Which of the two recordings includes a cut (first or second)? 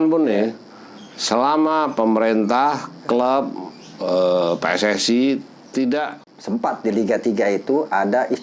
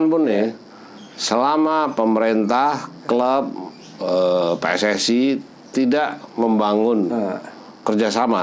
first